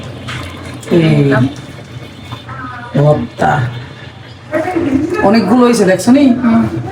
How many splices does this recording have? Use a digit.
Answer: 0